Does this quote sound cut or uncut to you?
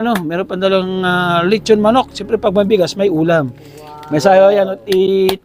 uncut